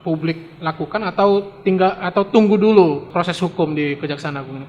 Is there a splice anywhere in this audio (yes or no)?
yes